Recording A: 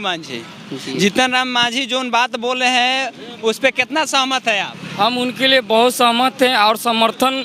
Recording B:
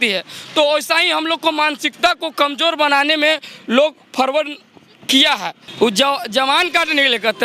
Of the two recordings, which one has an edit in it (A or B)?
B